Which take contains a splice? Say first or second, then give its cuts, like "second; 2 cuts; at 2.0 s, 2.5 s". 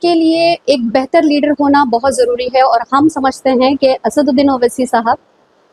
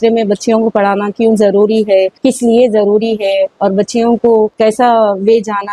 second; 2 cuts; at 2.1 s, 4.5 s